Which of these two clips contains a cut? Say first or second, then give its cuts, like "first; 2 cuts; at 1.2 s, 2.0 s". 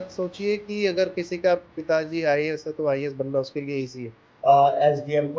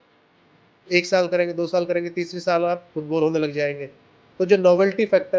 first; 1 cut; at 4.3 s